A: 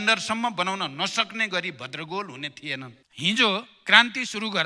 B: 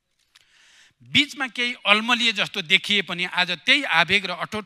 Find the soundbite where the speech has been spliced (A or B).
A